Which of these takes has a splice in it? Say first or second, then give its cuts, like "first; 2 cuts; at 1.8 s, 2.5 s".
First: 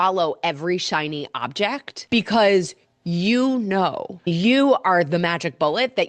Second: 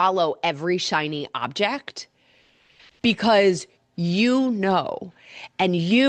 first; 2 cuts; at 1.9 s, 4.3 s